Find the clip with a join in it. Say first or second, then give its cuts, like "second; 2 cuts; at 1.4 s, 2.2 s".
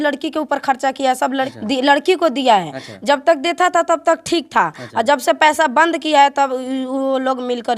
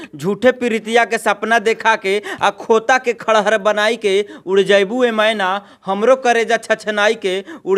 first; 1 cut; at 1.5 s